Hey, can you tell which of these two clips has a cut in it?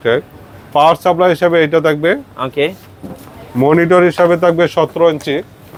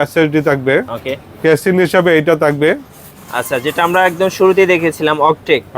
second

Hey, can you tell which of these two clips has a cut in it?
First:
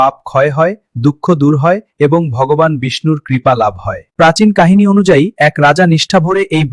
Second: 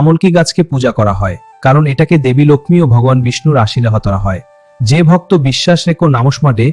first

